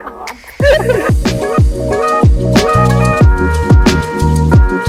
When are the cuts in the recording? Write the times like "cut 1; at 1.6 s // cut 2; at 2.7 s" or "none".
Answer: cut 1; at 1.0 s